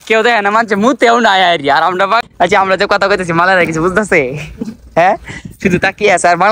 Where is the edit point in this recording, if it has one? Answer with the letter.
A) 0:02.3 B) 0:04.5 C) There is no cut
A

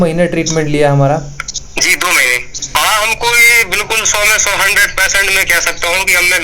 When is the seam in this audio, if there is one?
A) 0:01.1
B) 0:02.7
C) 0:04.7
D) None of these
B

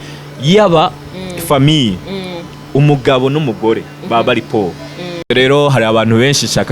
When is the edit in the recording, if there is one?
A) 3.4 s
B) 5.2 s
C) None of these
B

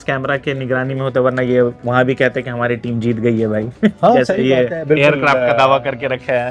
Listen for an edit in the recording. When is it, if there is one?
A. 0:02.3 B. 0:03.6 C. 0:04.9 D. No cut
D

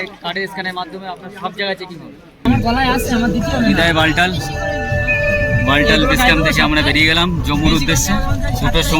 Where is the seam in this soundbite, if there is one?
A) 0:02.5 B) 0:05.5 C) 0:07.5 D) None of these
A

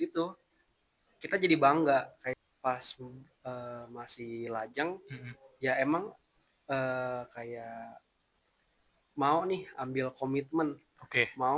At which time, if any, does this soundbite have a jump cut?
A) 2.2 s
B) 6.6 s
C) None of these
A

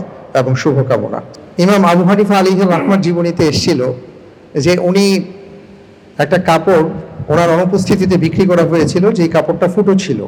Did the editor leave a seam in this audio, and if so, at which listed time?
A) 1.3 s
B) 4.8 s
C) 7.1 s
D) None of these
A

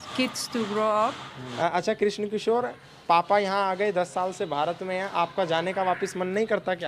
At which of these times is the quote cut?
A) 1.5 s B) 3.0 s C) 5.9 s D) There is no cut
A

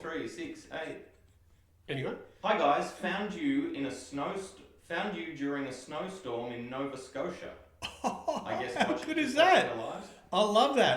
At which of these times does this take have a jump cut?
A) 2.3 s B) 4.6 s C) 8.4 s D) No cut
A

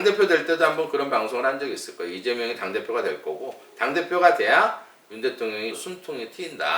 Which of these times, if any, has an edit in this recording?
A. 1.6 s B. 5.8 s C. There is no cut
B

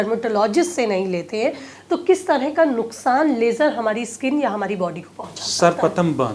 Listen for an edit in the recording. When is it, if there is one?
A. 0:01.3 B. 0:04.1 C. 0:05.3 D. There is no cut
D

